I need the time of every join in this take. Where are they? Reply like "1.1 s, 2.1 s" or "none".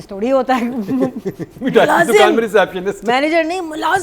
none